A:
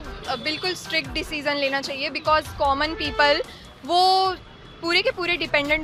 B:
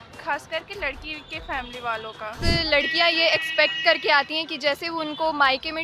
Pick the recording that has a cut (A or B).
B